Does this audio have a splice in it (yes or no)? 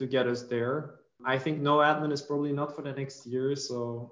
yes